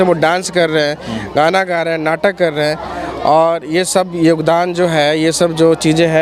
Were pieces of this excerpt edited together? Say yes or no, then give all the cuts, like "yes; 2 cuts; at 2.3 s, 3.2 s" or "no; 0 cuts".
no; 0 cuts